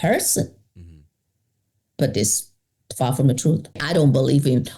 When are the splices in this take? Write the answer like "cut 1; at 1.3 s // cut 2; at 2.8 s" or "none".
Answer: cut 1; at 3.8 s